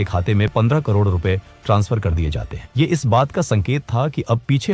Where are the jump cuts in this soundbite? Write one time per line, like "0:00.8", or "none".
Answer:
none